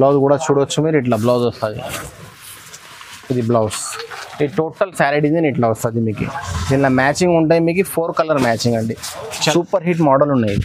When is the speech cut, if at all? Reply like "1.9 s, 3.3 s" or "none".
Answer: 9.5 s